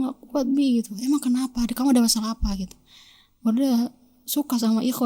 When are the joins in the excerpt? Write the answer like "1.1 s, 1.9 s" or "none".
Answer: none